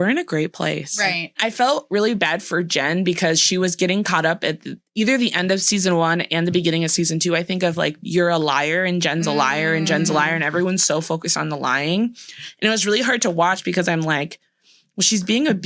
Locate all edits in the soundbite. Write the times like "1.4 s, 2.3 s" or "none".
1.4 s